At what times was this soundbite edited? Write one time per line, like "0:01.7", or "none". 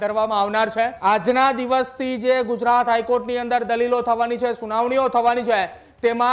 0:00.9